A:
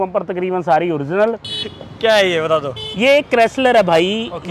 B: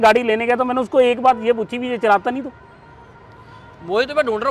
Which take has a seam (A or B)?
A